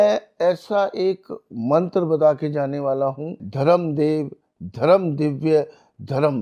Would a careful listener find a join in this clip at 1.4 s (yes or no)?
no